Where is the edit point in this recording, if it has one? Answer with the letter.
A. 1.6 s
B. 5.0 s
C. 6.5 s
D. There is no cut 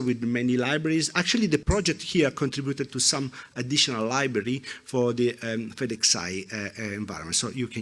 A